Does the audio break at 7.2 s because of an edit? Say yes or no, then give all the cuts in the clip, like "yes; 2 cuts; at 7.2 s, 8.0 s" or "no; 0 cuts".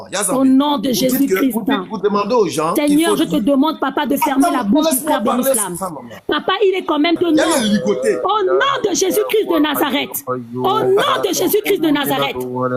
yes; 1 cut; at 7.2 s